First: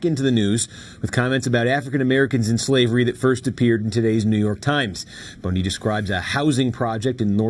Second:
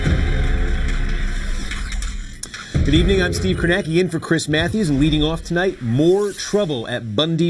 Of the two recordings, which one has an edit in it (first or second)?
first